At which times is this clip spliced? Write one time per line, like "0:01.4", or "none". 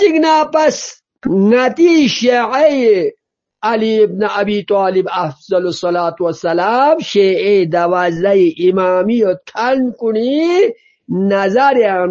none